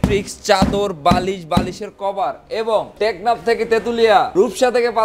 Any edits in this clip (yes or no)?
yes